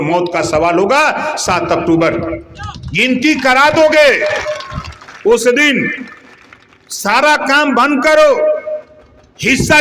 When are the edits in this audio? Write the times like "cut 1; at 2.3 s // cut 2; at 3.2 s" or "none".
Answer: none